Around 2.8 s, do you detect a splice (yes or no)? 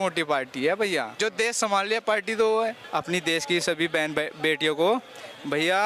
yes